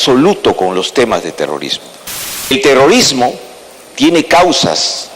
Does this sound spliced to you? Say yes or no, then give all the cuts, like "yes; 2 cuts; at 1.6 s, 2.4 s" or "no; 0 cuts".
yes; 1 cut; at 2.5 s